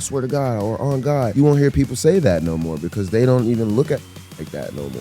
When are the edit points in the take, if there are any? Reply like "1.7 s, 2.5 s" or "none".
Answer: 1.3 s